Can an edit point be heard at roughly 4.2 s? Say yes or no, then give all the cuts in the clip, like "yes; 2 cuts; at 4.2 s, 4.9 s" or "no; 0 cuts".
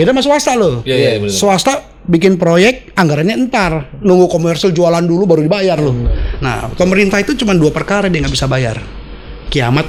no; 0 cuts